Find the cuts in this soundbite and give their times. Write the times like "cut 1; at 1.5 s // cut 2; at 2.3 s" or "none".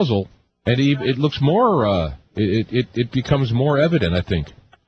cut 1; at 3.9 s

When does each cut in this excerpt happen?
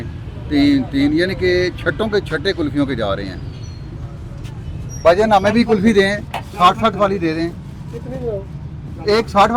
none

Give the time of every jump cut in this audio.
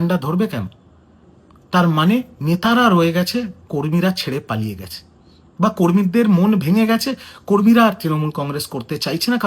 cut 1; at 1.0 s

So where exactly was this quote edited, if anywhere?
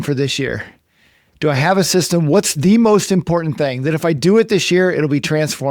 none

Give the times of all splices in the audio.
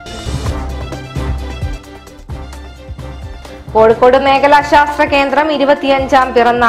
cut 1; at 2.5 s

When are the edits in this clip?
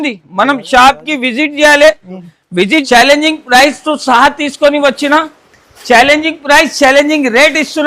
cut 1; at 2.8 s

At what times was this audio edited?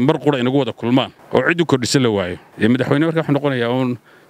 cut 1; at 1.2 s // cut 2; at 2.4 s

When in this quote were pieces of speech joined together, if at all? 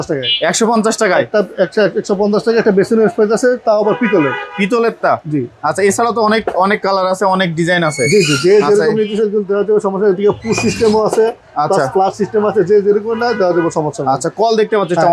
none

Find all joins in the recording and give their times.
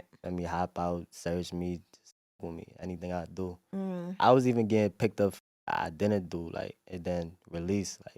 none

